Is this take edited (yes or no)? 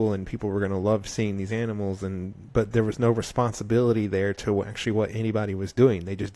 no